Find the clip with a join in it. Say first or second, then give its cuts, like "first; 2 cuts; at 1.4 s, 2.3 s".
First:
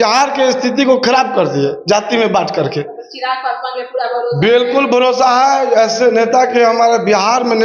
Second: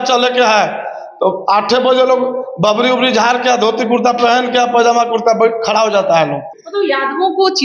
second; 1 cut; at 6.6 s